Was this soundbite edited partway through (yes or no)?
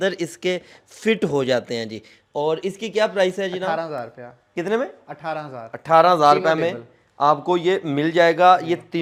no